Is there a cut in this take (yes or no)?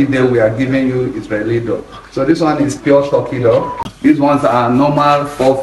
yes